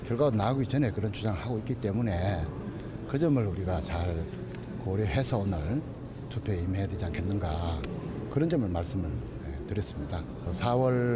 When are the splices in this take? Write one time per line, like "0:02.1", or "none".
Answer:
0:04.1